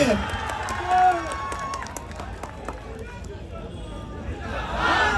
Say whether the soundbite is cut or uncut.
uncut